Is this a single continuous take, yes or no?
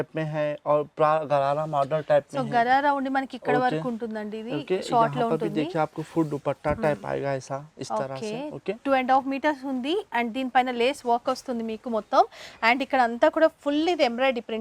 yes